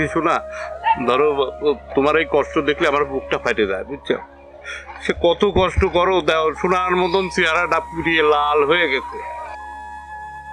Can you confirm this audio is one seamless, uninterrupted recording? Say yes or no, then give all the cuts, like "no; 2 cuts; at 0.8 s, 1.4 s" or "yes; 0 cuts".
yes; 0 cuts